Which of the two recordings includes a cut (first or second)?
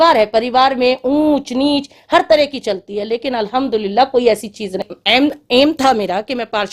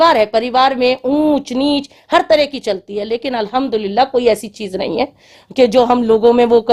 first